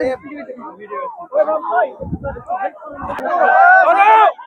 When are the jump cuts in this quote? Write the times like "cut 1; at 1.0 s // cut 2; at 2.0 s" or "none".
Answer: cut 1; at 3.2 s